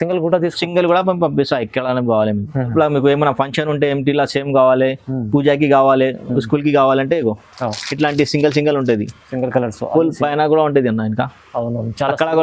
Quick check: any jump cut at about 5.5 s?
no; 1 cut; at 2.7 s

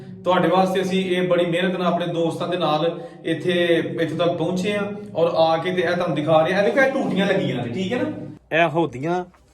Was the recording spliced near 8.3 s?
yes; 1 cut; at 8.3 s

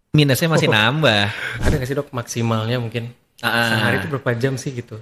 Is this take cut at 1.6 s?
yes; 1 cut; at 1.6 s

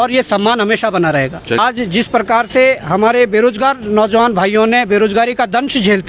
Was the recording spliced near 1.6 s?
yes; 1 cut; at 1.6 s

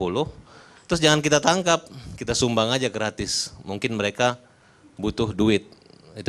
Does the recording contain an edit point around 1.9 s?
no; 1 cut; at 4.6 s

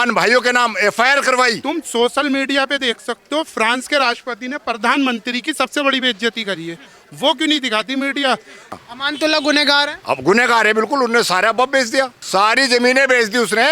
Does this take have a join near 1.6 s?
yes; 3 cuts; at 1.6 s, 8.8 s, 12.2 s

